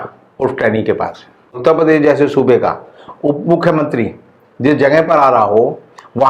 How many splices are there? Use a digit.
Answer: 1